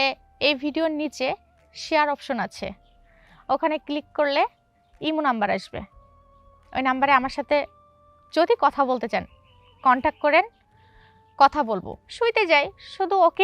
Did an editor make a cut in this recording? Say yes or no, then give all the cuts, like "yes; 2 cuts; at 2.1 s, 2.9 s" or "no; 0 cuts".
yes; 1 cut; at 12.0 s